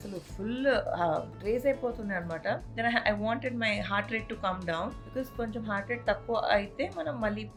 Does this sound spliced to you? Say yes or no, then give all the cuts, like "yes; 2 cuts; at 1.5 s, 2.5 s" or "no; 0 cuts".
no; 0 cuts